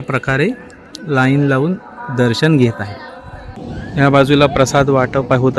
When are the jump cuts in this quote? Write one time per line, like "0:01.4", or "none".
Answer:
0:03.8

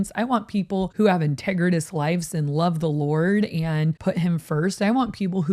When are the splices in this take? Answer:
0:00.9
0:04.0

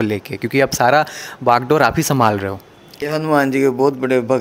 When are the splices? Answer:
0:03.0

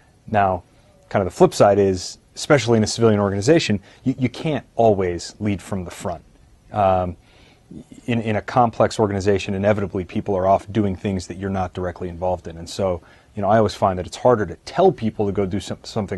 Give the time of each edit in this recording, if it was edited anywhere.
0:07.6

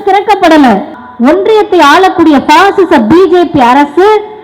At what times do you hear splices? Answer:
0:01.0

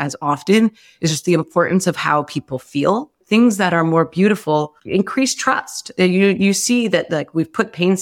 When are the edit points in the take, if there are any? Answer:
0:03.2
0:04.8

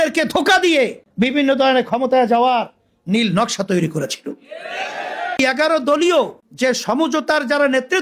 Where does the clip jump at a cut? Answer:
0:01.0
0:05.4
0:06.4

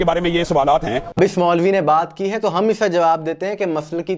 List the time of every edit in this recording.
0:01.1

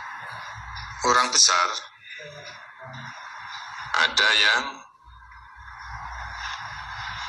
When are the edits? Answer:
none

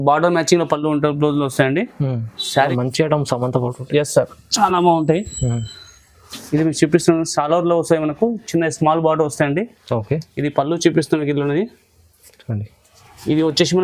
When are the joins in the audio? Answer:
0:02.7

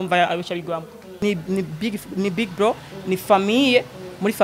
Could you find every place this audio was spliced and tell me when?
0:01.2

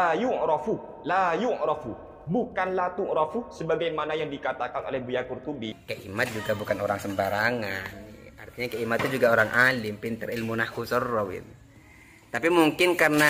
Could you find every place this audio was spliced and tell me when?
0:05.8

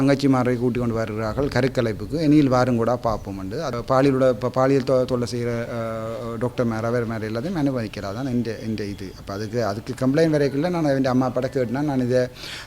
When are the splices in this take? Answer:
0:03.7

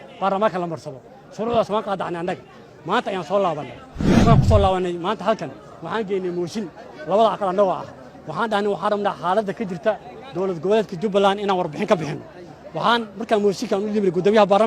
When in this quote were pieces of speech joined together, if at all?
0:04.0

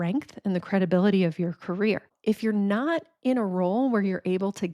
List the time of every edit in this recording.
0:02.1

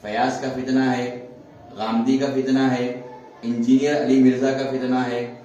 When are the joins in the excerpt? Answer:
none

